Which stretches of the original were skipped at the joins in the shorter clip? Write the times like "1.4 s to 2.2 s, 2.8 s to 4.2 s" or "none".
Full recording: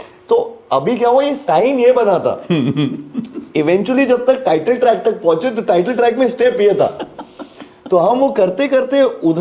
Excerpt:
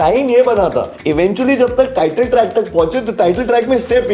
2.4 s to 3.4 s